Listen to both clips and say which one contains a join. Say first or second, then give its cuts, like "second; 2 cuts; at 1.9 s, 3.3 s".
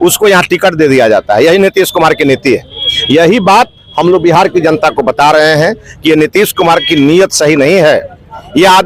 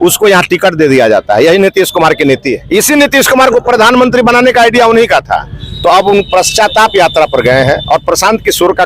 second; 1 cut; at 2.6 s